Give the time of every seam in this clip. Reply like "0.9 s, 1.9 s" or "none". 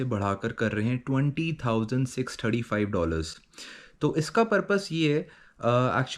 none